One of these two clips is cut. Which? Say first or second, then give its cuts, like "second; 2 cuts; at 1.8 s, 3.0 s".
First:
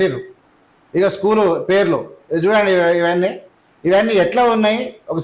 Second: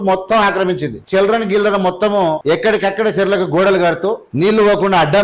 second; 3 cuts; at 0.9 s, 2.4 s, 4.3 s